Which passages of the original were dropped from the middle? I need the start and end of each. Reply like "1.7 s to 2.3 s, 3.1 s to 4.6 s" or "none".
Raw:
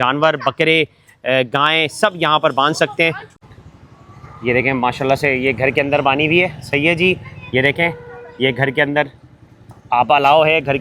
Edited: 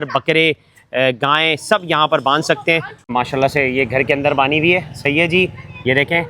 3.4 s to 4.8 s